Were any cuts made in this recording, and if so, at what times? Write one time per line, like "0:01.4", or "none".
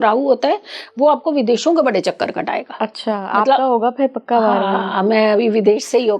none